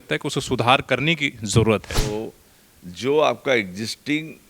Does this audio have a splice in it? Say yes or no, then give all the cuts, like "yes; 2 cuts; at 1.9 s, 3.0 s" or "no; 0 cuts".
yes; 1 cut; at 1.9 s